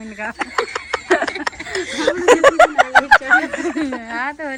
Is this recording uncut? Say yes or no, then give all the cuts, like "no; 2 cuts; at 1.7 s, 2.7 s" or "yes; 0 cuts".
yes; 0 cuts